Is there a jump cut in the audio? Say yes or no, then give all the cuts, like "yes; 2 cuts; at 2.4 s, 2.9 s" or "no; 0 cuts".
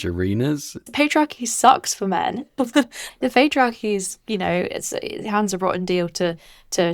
yes; 2 cuts; at 0.9 s, 3.0 s